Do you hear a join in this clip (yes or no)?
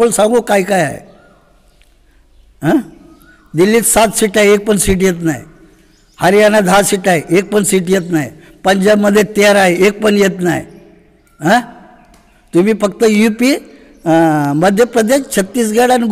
no